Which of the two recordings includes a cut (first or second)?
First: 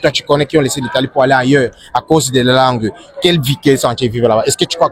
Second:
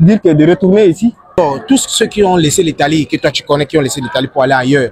second